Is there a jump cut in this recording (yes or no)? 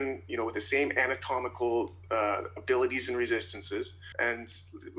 yes